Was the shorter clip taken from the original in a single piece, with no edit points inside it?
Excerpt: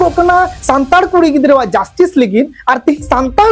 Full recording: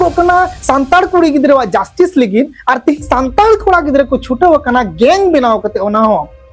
yes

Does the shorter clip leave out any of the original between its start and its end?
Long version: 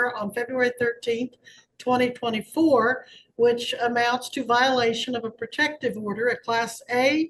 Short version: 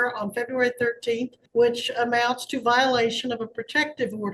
yes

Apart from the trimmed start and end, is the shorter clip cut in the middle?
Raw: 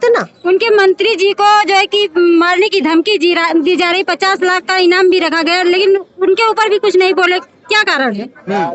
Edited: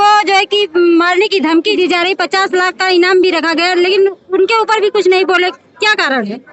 yes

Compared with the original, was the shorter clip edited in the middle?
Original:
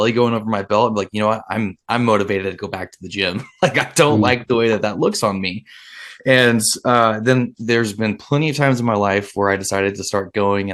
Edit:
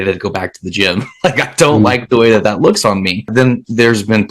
yes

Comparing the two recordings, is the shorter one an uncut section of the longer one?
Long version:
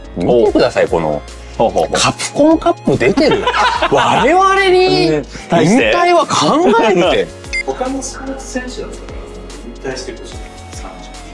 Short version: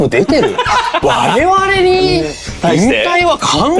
yes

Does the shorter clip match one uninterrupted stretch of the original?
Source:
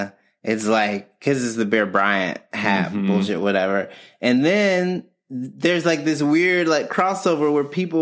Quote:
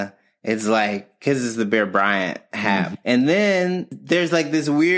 no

